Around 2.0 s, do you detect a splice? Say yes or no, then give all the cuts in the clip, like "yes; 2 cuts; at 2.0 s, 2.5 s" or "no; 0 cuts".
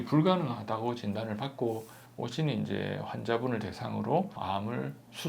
no; 1 cut; at 4.4 s